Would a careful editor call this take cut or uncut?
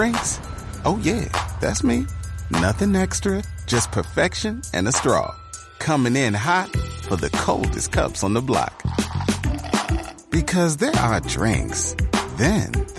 uncut